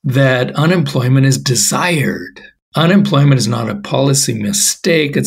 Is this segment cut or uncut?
uncut